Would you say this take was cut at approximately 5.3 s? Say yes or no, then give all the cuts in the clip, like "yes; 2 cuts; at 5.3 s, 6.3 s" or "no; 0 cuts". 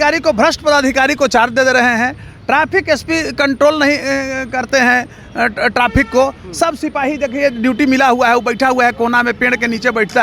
no; 0 cuts